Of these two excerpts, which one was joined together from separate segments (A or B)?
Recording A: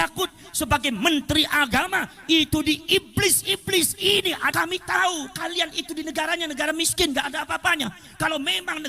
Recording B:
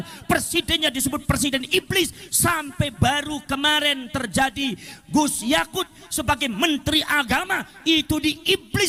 A